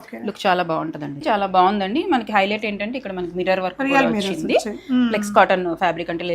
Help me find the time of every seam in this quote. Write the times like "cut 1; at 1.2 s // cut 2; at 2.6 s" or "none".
cut 1; at 1.2 s